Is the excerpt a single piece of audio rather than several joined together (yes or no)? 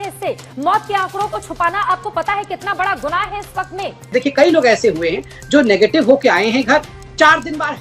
no